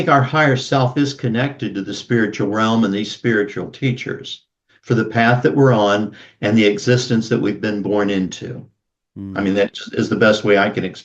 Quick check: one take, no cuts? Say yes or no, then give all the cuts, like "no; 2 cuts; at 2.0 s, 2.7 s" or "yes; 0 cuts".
yes; 0 cuts